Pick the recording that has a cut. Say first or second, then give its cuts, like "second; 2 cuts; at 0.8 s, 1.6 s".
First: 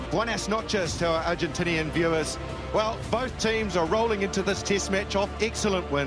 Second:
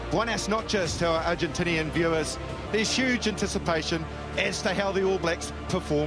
second; 1 cut; at 2.5 s